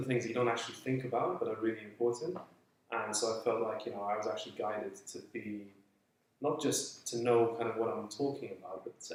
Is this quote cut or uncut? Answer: uncut